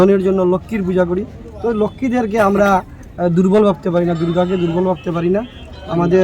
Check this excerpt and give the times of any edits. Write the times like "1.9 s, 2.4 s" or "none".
none